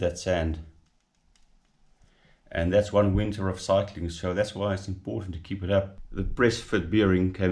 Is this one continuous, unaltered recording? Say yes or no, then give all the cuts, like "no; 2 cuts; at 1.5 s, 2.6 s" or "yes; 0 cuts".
no; 1 cut; at 6.0 s